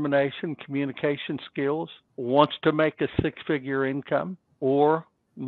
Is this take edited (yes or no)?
yes